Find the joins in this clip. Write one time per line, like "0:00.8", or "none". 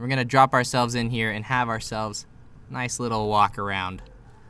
none